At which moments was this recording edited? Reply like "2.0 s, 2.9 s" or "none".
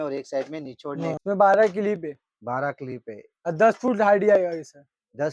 1.2 s